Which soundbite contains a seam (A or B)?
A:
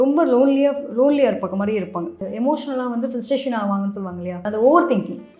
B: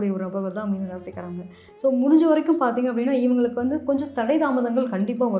A